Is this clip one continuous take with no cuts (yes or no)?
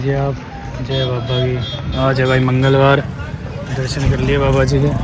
yes